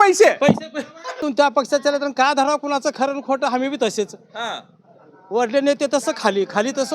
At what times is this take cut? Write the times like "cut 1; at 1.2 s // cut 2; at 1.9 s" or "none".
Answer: cut 1; at 1.3 s